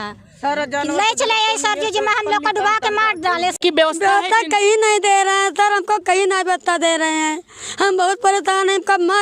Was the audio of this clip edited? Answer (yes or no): yes